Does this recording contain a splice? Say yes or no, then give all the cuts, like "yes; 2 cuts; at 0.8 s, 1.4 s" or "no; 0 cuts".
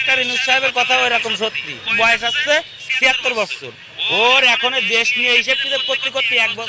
yes; 1 cut; at 1.9 s